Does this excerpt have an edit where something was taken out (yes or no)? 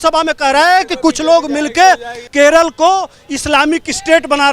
yes